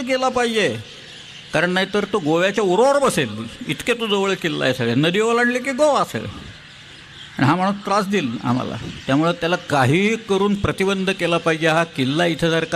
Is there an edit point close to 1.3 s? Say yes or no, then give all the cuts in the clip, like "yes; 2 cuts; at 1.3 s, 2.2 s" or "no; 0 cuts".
no; 0 cuts